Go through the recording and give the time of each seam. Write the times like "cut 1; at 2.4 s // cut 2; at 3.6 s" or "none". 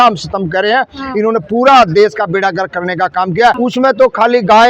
cut 1; at 3.6 s